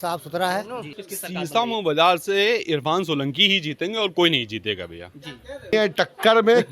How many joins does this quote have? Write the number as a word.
two